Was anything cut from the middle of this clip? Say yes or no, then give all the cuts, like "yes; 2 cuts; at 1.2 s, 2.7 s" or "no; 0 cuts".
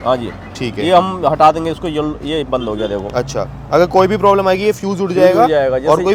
no; 0 cuts